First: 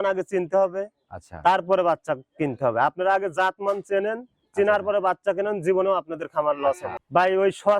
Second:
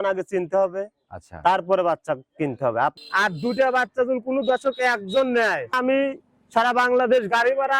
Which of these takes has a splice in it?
second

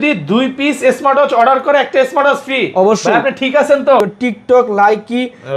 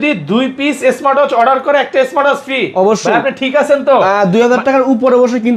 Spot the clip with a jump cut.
first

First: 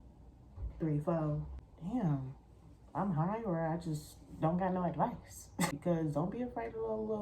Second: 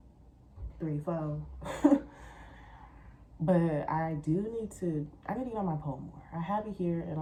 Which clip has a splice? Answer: first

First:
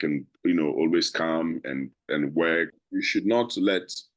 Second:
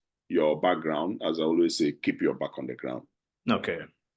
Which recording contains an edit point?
first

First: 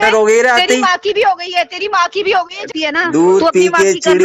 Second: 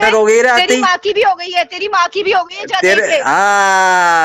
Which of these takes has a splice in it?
first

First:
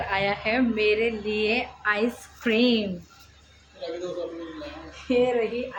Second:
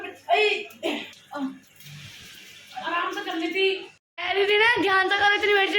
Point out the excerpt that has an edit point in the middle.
second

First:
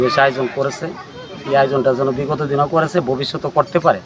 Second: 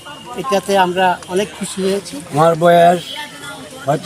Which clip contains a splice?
second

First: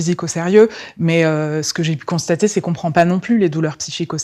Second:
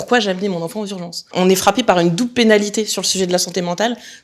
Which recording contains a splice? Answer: second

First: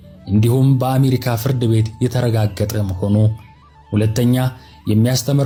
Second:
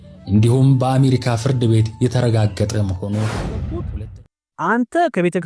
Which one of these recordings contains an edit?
second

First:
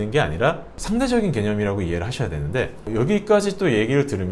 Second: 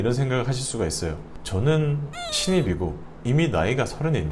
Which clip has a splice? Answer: second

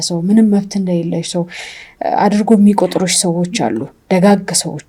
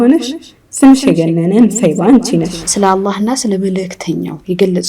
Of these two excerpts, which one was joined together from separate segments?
second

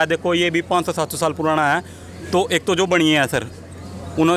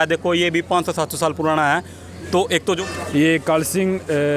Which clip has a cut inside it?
second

